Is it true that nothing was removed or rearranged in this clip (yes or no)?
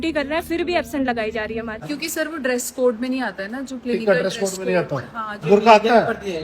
no